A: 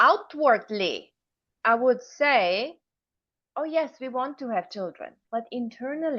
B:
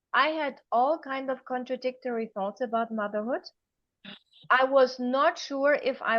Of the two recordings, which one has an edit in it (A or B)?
A